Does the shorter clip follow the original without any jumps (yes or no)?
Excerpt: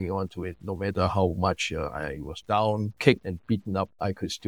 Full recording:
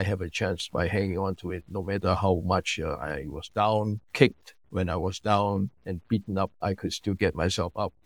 no